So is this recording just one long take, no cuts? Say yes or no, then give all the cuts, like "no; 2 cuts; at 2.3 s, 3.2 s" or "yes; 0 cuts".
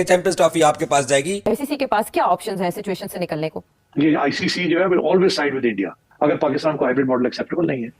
no; 3 cuts; at 1.4 s, 3.7 s, 6.1 s